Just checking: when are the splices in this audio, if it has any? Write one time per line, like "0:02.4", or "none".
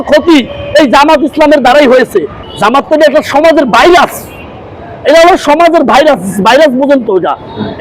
0:02.4